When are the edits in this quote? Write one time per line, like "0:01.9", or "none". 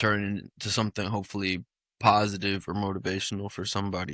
none